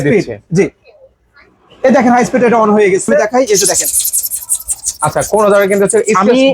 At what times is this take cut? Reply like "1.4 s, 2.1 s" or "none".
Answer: 3.3 s